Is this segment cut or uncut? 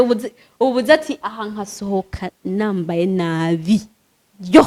uncut